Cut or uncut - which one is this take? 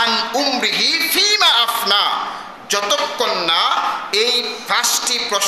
uncut